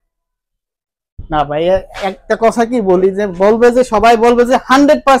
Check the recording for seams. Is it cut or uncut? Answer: uncut